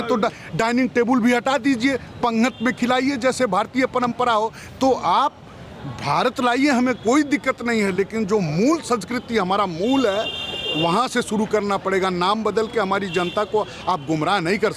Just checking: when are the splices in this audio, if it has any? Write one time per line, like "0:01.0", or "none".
none